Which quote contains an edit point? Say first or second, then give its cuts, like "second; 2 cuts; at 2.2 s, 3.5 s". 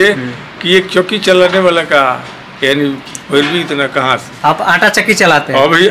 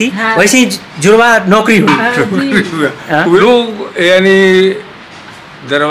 second; 1 cut; at 3.4 s